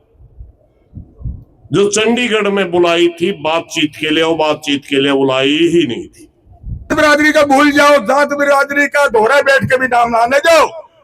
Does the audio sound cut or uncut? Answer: cut